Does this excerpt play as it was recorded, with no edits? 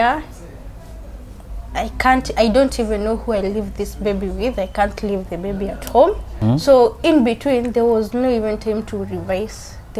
no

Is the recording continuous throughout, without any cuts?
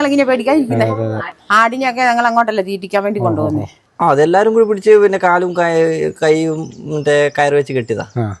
no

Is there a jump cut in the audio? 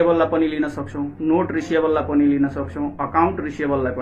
no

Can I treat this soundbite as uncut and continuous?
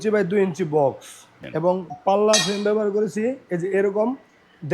no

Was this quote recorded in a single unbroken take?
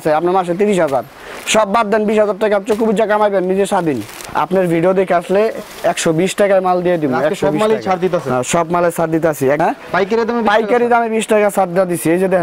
no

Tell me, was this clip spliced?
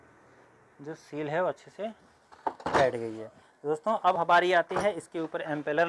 no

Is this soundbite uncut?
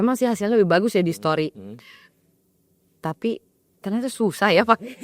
yes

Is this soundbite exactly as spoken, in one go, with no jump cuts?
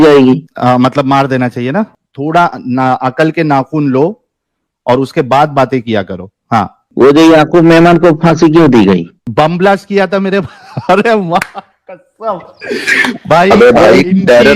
no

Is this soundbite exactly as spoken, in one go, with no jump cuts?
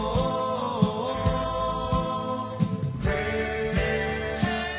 yes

